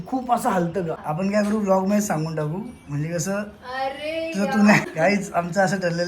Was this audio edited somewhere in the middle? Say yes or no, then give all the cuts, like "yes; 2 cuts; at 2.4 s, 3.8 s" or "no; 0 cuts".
yes; 2 cuts; at 1.0 s, 4.8 s